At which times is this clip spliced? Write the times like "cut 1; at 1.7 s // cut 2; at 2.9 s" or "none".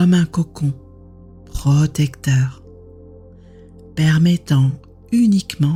none